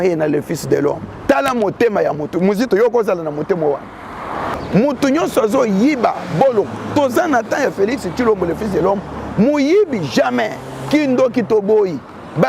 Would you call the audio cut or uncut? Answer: cut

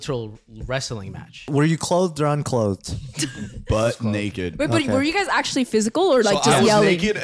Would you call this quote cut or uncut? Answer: cut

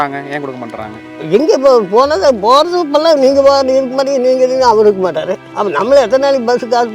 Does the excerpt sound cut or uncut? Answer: cut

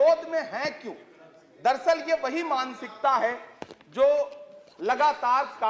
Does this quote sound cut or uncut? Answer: uncut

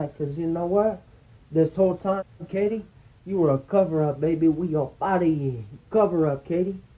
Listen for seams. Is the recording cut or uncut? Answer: uncut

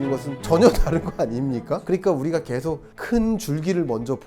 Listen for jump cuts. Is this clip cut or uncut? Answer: cut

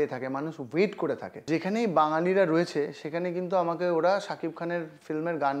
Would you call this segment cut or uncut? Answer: cut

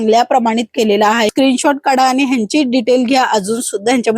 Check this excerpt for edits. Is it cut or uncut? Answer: cut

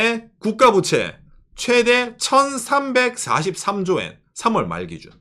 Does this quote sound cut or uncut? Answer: uncut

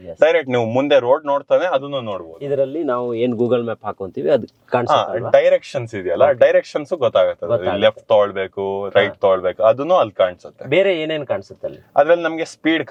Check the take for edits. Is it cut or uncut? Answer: uncut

